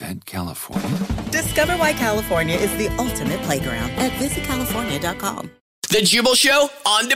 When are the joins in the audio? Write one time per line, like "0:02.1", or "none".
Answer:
0:05.7